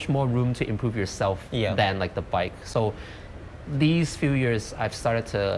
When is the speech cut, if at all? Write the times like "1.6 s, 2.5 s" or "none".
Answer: none